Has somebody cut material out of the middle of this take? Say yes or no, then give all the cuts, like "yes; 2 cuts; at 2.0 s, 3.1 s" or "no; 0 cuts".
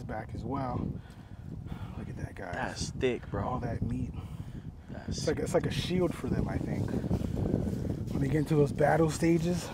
no; 0 cuts